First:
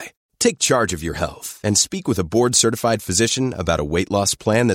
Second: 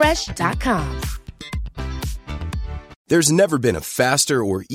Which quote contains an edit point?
second; 1 cut; at 3.0 s

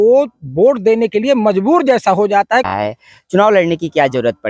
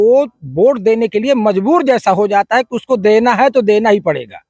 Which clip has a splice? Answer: first; 1 cut; at 2.7 s

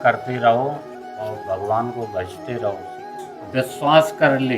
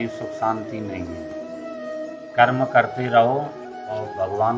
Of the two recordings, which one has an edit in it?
first; 1 cut; at 3.0 s

